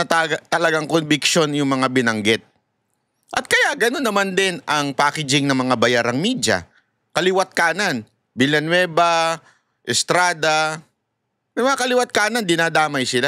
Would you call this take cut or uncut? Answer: uncut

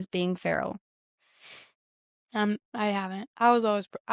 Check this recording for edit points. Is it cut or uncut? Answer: cut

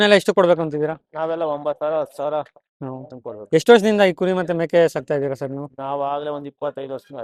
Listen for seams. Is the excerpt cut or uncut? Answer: uncut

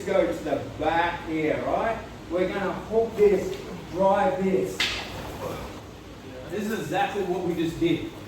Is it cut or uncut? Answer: cut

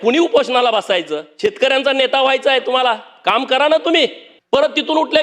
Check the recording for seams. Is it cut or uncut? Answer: cut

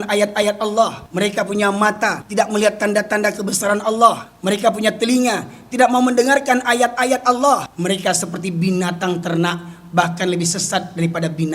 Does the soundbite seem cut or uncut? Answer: cut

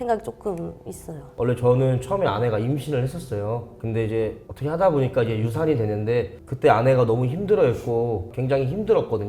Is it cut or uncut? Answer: cut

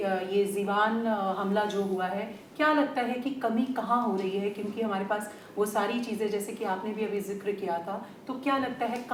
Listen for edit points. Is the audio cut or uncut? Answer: uncut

